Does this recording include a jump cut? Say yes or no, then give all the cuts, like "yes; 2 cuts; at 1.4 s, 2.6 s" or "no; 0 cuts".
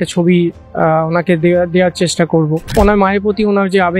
yes; 1 cut; at 2.7 s